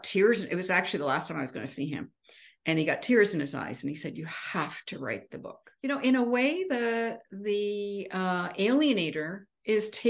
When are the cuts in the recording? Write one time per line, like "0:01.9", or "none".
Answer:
0:05.7